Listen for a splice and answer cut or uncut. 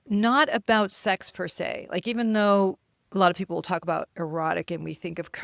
uncut